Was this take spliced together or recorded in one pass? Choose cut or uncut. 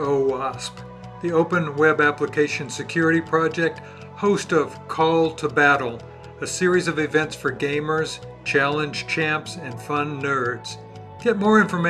uncut